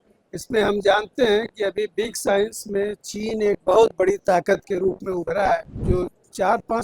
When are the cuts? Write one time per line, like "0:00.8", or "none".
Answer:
0:05.7